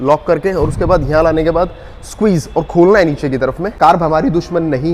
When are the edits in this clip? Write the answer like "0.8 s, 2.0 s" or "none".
3.8 s